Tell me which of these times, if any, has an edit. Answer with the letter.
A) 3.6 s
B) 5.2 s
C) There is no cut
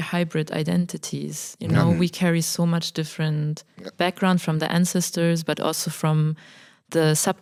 C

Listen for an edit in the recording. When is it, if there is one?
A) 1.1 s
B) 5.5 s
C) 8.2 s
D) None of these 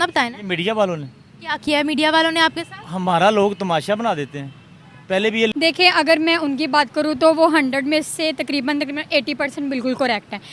B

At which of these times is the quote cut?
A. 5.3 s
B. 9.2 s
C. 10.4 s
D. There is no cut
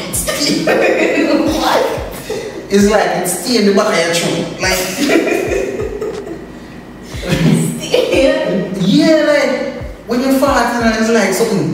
A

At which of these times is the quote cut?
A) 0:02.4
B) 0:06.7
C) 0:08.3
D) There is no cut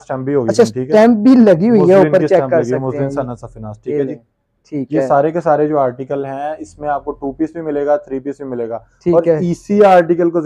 D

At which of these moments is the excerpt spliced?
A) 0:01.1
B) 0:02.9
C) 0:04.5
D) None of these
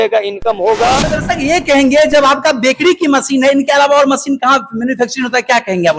A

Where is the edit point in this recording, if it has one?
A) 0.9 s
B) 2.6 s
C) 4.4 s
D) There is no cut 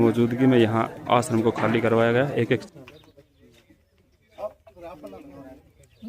B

